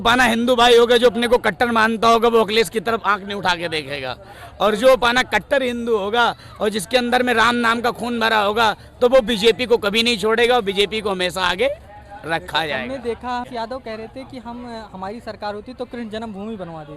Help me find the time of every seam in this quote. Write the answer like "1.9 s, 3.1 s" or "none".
13.5 s